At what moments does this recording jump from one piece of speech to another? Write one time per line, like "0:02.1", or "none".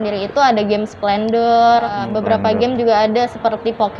0:02.1